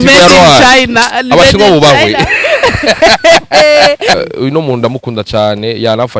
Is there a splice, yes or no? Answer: yes